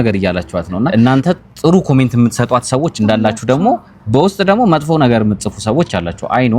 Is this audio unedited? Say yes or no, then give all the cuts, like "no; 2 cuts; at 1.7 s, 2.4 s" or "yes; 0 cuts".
no; 1 cut; at 0.9 s